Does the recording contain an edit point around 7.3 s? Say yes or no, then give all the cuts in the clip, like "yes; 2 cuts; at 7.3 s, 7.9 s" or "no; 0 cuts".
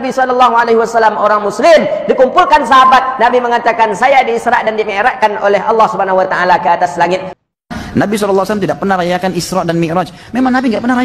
yes; 1 cut; at 7.3 s